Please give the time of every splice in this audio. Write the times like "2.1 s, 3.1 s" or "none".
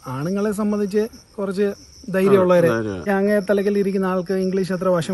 3.0 s